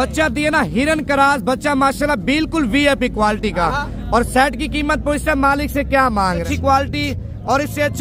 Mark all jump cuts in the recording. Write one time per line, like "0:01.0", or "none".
0:06.4